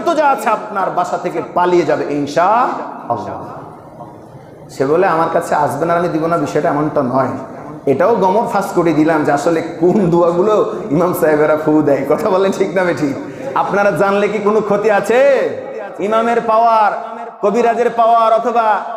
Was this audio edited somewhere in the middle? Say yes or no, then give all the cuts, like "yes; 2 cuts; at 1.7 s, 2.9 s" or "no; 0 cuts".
no; 0 cuts